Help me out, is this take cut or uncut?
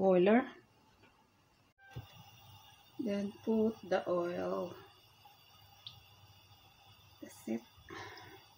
cut